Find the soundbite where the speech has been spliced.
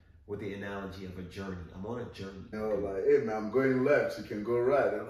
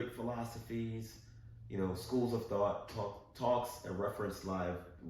first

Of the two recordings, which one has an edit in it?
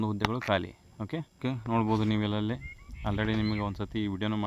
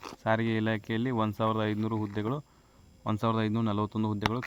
first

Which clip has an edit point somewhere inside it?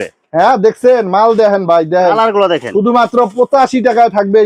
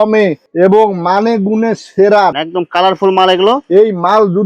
second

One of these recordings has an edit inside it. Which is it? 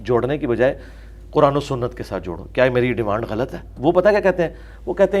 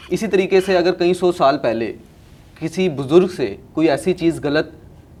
first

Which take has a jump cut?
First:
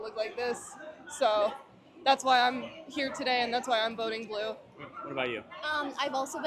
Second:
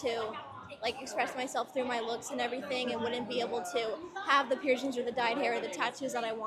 first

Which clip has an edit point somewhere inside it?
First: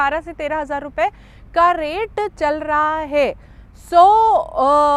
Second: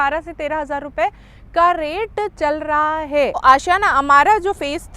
second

